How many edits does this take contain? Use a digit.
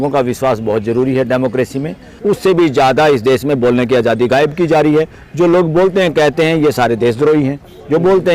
1